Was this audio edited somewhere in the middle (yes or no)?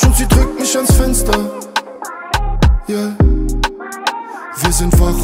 no